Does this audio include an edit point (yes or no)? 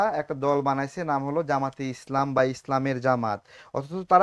no